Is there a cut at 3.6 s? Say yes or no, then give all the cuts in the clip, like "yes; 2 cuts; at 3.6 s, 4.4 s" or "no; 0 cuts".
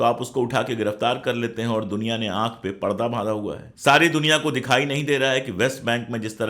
yes; 1 cut; at 3.6 s